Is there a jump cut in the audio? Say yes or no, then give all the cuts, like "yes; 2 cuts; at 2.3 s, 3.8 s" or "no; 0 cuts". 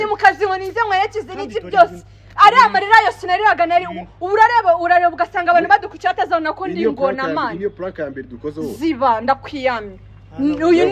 no; 0 cuts